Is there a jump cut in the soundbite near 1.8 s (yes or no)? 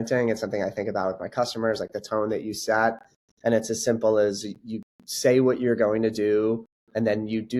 no